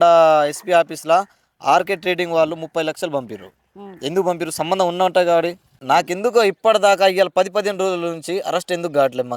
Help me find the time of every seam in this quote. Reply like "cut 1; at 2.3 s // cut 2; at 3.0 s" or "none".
cut 1; at 5.7 s